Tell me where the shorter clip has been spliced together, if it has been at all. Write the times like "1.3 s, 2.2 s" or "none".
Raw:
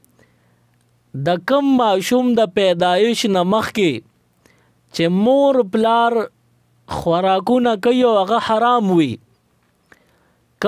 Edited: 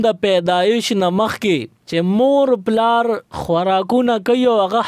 1.8 s, 3.3 s